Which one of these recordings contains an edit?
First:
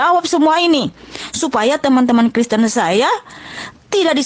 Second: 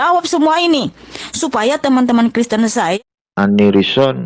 second; 1 cut; at 3.0 s

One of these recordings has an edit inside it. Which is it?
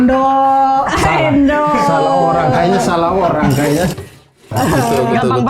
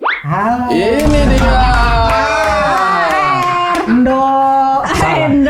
first; 1 cut; at 4.2 s

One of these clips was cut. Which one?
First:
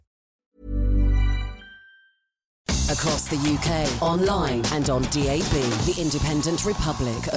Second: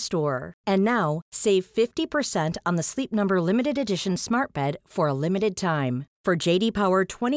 first; 1 cut; at 2.7 s

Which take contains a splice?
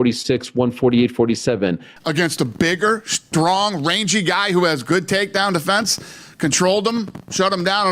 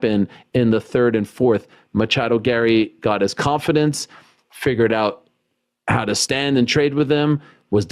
first; 1 cut; at 1.9 s

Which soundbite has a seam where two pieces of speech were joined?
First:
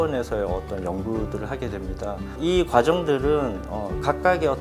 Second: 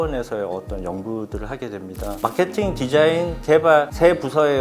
second; 1 cut; at 2.2 s

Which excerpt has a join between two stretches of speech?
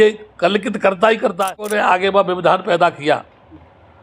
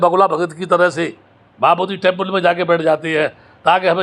first; 1 cut; at 1.6 s

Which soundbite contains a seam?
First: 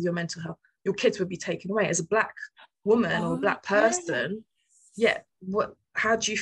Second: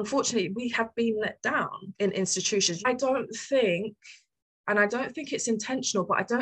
second; 2 cuts; at 1.8 s, 2.8 s

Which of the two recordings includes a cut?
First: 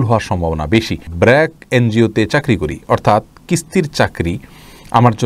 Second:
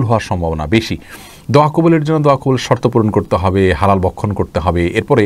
first; 1 cut; at 1.0 s

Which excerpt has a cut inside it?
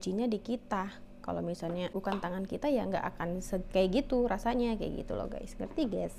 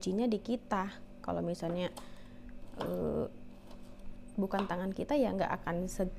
first; 1 cut; at 2.0 s

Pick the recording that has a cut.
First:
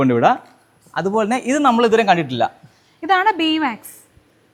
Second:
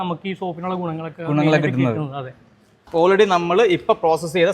second; 1 cut; at 2.8 s

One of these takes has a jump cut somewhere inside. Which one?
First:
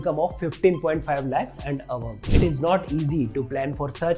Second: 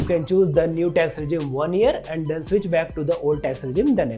first; 1 cut; at 2.3 s

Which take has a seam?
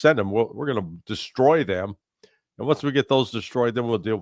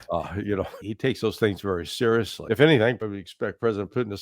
second; 3 cuts; at 0.9 s, 2.4 s, 3.0 s

